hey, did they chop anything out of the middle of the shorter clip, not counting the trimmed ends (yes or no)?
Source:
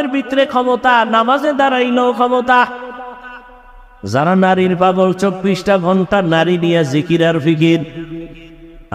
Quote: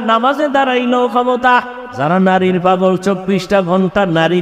yes